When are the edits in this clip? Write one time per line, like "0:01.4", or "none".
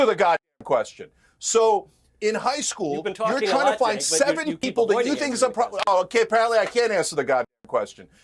none